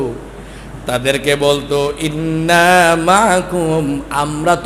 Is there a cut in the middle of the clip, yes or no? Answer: no